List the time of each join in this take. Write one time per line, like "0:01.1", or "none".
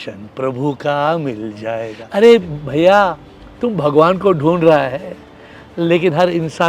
0:02.0